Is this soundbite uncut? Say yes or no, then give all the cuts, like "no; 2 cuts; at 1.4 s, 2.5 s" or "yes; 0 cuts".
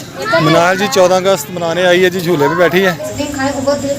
no; 1 cut; at 3.1 s